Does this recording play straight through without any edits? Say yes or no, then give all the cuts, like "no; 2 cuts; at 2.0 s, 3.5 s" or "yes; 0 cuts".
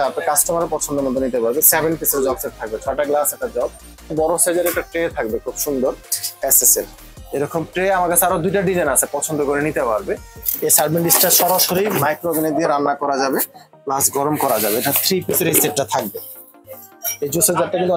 no; 3 cuts; at 4.1 s, 10.4 s, 16.6 s